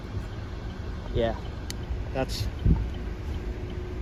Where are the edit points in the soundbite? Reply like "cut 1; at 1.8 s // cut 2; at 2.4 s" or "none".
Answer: none